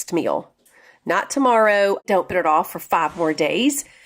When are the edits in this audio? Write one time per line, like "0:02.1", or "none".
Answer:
0:02.0